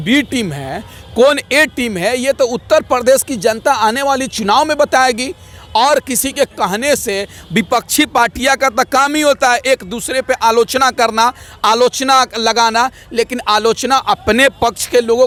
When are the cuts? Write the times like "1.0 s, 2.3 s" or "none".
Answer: none